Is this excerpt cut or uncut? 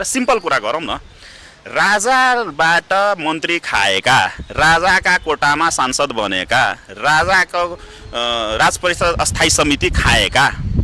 uncut